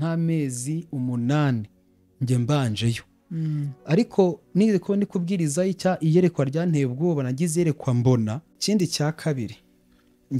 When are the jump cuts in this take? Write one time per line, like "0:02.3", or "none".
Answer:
0:08.5